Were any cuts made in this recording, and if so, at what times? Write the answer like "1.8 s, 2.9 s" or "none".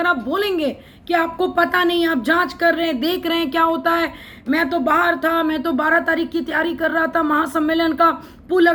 none